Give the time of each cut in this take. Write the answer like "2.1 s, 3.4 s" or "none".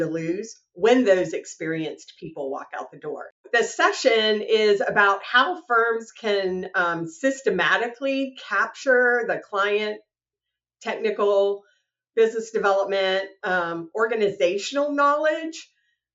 3.5 s